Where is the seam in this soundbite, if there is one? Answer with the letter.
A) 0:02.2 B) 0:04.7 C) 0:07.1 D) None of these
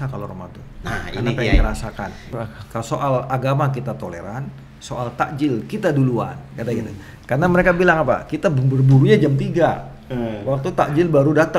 A